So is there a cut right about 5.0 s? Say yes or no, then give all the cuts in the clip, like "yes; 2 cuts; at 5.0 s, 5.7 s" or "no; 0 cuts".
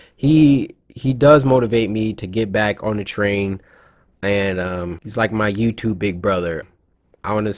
yes; 2 cuts; at 5.0 s, 6.6 s